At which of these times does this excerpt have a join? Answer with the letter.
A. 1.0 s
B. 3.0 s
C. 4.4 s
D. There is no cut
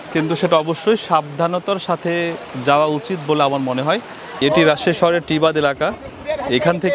C